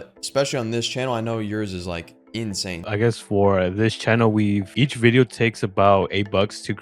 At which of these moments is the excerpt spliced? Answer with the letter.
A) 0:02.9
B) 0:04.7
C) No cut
A